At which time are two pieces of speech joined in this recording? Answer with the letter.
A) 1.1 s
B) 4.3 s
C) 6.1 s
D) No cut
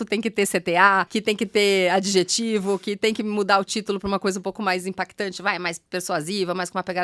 A